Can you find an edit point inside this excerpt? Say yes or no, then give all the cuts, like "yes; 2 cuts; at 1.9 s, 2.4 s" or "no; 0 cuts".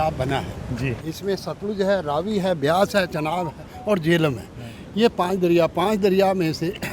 yes; 1 cut; at 1.0 s